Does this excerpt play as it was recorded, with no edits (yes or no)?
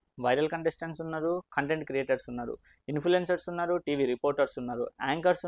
yes